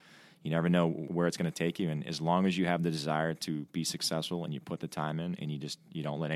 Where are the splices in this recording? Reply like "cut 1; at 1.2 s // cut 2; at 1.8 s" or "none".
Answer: cut 1; at 1.1 s

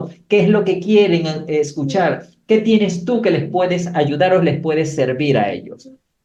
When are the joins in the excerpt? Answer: none

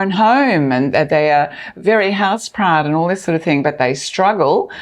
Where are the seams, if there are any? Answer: none

